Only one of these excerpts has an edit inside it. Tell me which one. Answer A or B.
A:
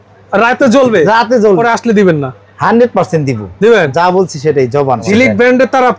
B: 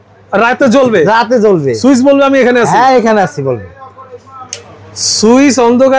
A